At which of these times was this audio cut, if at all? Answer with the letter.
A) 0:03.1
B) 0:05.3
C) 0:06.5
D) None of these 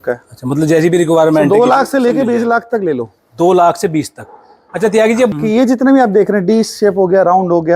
B